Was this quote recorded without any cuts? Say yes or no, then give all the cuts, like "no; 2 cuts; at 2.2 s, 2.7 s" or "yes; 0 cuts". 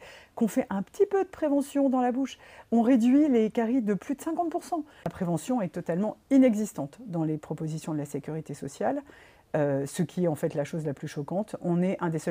no; 1 cut; at 5.1 s